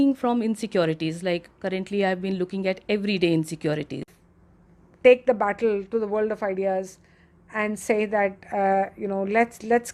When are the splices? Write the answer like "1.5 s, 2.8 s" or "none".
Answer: 4.1 s